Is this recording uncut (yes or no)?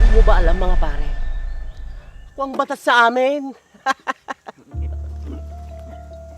yes